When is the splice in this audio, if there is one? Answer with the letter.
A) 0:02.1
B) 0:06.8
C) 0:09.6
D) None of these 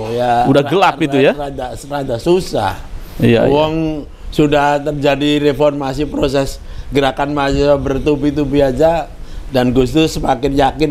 D